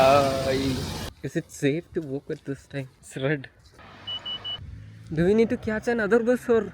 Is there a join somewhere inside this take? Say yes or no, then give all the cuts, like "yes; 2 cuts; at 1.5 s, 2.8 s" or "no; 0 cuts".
yes; 4 cuts; at 1.1 s, 3.0 s, 3.6 s, 4.6 s